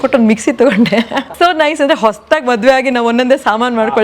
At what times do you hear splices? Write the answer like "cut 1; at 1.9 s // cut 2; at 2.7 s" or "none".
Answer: cut 1; at 1.3 s